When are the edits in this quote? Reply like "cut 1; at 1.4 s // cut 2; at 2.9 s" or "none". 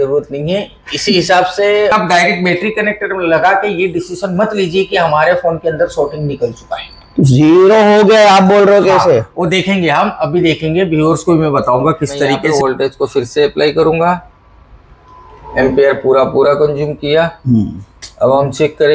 cut 1; at 1.9 s // cut 2; at 12.4 s